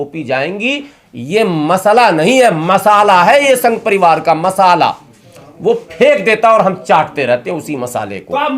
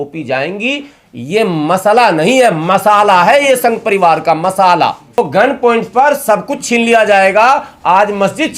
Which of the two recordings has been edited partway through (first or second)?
second